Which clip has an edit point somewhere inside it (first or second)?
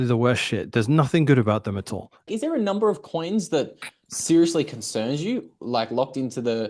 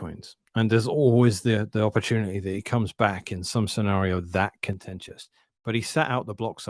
first